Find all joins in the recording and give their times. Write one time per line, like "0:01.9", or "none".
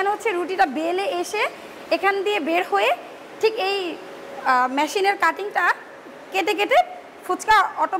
none